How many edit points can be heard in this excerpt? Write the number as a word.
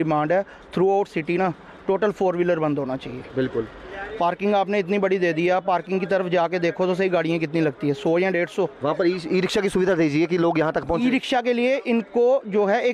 zero